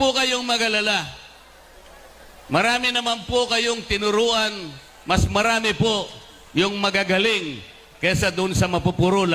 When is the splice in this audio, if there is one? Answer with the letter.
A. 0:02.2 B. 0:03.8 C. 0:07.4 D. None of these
D